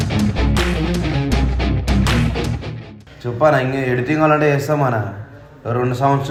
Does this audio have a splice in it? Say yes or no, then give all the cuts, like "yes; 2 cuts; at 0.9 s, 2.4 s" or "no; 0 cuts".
no; 0 cuts